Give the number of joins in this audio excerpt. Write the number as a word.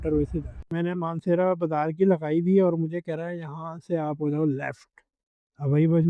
zero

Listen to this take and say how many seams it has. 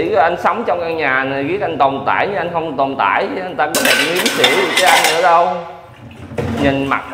zero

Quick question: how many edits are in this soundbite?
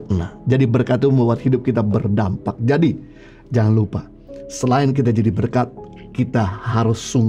zero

